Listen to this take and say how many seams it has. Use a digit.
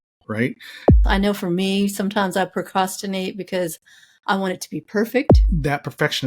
2